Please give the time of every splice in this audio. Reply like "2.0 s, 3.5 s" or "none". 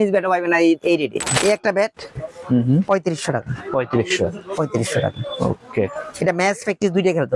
1.3 s